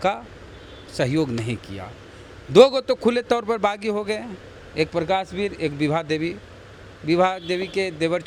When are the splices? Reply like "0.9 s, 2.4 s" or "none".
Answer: none

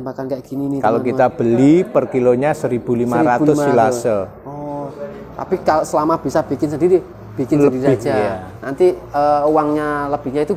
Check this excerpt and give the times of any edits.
none

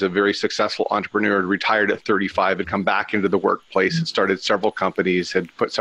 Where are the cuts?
none

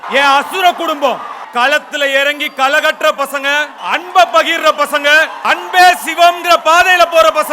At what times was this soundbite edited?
1.4 s, 3.8 s, 5.4 s

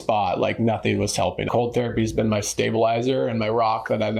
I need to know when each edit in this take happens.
1.5 s

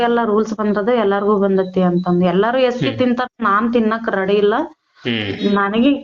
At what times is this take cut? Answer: none

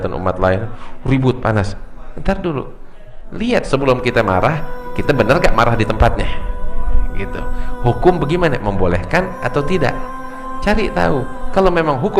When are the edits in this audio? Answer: 3.2 s

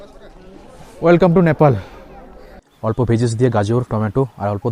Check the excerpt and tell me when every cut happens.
2.3 s

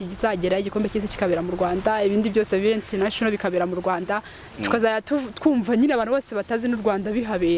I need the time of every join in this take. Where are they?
none

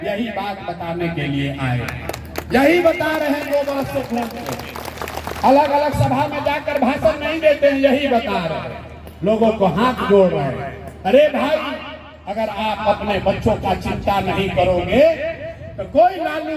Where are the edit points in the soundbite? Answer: none

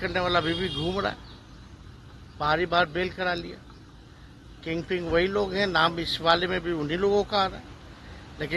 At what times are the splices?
none

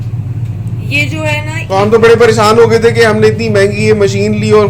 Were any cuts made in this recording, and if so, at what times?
1.6 s

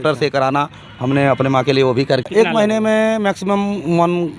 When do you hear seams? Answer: 2.2 s

